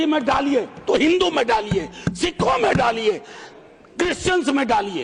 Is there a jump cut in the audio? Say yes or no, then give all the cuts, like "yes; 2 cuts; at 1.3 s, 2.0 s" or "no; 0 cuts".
no; 0 cuts